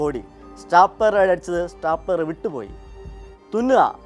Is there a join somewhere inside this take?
no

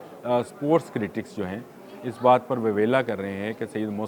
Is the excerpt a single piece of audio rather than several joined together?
yes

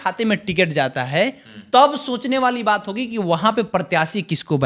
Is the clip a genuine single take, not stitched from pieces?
yes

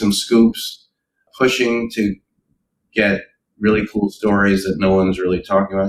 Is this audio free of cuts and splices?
yes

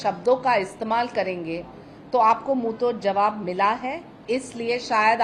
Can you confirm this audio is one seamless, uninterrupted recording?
yes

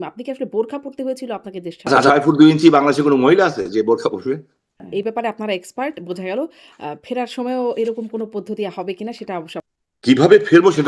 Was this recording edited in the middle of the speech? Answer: yes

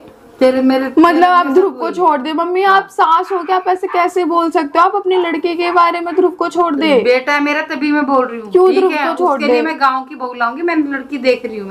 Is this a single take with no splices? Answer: yes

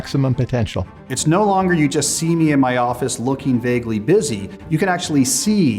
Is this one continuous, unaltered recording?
no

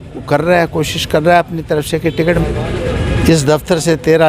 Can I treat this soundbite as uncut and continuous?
no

